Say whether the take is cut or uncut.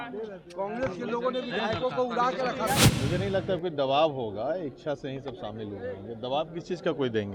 cut